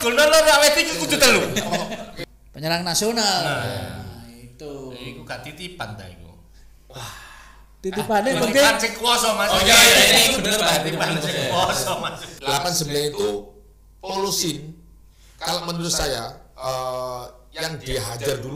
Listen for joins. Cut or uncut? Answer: cut